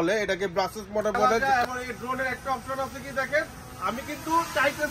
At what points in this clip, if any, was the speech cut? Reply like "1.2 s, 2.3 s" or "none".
1.4 s